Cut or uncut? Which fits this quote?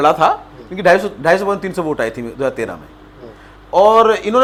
uncut